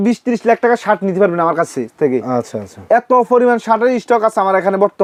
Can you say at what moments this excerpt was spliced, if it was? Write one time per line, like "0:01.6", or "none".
none